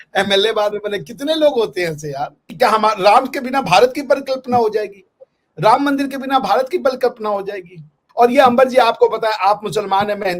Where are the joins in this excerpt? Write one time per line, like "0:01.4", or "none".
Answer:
0:02.4
0:08.0